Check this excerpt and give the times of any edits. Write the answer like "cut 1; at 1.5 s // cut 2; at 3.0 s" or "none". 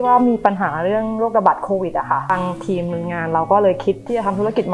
none